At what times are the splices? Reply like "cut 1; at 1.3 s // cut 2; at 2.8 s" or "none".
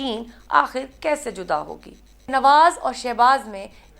cut 1; at 2.3 s